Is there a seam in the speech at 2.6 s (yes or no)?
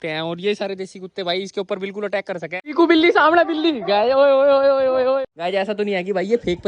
yes